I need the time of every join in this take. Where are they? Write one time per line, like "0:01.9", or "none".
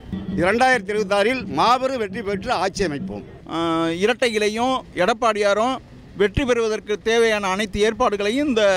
0:03.3

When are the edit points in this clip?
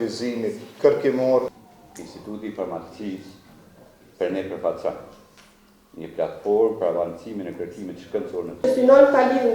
0:01.6
0:08.6

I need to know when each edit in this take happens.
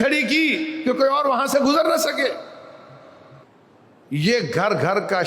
0:03.4

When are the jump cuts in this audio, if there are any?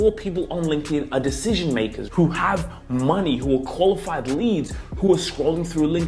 0:02.0

